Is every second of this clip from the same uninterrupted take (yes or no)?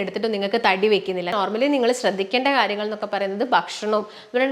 no